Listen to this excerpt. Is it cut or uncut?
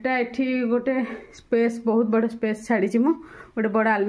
uncut